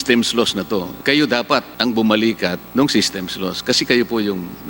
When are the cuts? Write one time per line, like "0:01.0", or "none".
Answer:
0:00.9